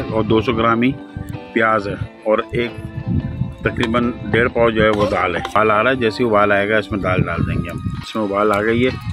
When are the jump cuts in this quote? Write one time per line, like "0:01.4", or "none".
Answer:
0:05.6
0:08.0